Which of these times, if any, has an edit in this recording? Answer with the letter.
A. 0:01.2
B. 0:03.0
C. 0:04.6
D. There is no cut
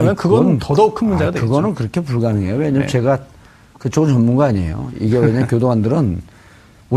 B